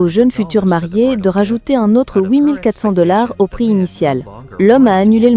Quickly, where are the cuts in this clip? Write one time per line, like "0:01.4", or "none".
0:04.4